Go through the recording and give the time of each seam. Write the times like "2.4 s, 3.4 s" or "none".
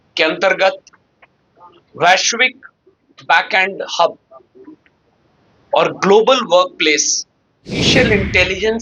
7.9 s